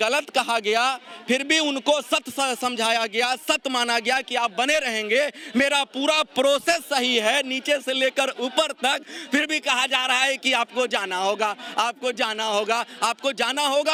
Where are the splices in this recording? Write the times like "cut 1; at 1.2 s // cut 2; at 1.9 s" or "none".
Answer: none